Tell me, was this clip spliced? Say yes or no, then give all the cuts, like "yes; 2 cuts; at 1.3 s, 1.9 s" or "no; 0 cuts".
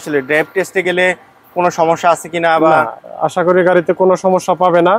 no; 0 cuts